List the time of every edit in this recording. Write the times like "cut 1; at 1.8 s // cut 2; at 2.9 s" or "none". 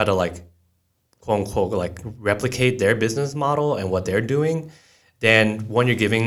none